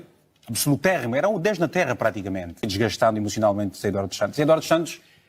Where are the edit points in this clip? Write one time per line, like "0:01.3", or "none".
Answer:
0:02.7